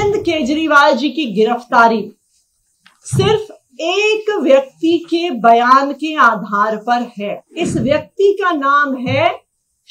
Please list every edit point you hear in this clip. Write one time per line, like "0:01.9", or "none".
0:07.4